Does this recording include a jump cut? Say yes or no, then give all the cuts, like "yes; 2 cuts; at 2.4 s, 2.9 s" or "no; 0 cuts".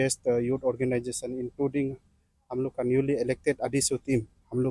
no; 0 cuts